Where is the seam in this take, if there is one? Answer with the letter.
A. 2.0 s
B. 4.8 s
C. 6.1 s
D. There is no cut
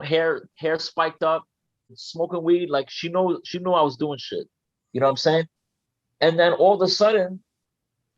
A